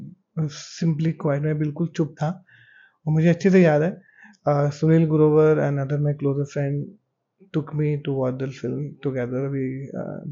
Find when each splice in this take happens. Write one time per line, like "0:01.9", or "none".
none